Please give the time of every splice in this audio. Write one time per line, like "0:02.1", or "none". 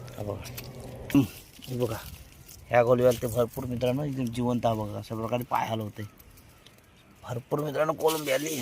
0:01.1